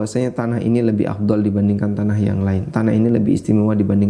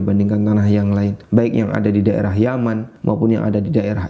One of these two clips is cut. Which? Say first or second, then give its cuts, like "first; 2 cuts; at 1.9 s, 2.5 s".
second; 2 cuts; at 1.2 s, 2.9 s